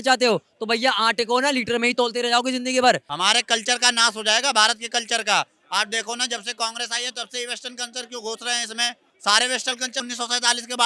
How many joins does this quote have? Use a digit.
3